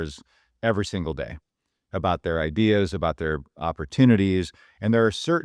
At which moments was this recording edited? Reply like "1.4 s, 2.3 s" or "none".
none